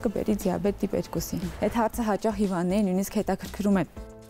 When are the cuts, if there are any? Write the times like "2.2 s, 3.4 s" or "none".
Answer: 1.4 s